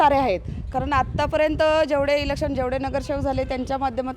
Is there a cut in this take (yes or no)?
no